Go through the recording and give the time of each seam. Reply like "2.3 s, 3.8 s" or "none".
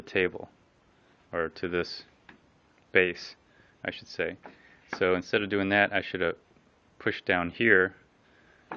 none